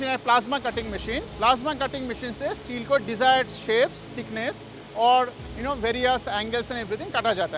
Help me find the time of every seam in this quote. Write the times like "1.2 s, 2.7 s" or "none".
1.3 s